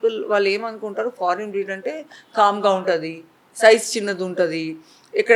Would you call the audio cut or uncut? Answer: uncut